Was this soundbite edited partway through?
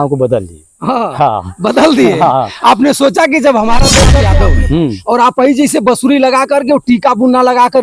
yes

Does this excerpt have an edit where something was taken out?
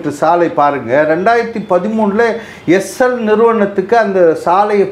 no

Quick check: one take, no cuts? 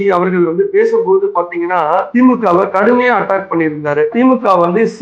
no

